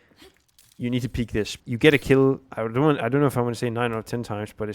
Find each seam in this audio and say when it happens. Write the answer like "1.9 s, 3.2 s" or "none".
1.6 s, 2.5 s